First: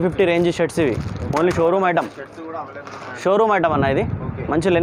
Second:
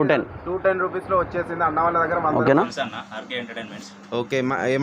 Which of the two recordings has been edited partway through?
second; 1 cut; at 2.7 s

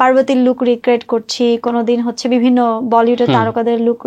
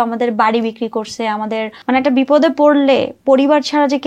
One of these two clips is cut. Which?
second; 1 cut; at 1.7 s

